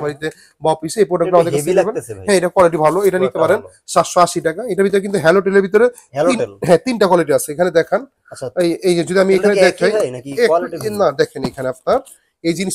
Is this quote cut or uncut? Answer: uncut